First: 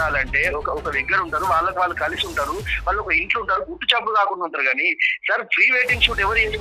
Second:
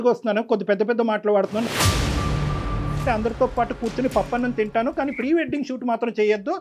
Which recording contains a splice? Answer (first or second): second